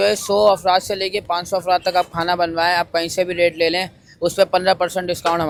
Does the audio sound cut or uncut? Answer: uncut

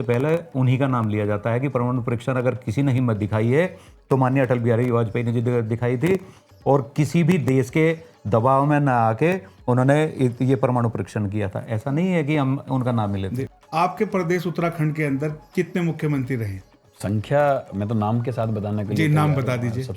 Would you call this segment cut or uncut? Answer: uncut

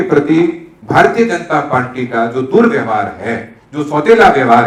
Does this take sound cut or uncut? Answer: uncut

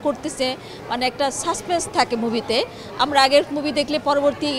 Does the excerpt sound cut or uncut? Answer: uncut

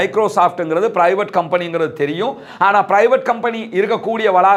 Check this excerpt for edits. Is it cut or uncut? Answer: uncut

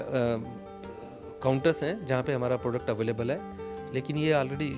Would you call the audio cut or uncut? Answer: uncut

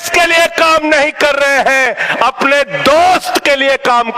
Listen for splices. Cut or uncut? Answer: uncut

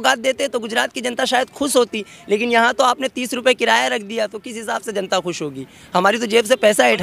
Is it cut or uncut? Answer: uncut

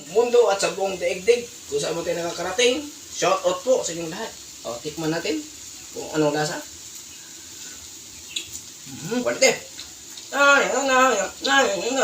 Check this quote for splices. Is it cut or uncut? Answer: cut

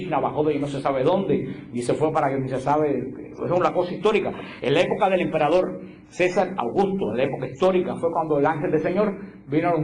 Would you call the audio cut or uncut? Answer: cut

